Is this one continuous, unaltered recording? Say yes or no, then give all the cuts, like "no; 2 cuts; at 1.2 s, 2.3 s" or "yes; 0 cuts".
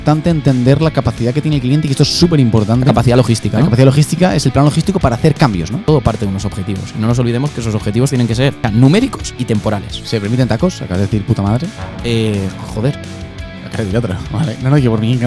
no; 3 cuts; at 5.8 s, 8.6 s, 10.0 s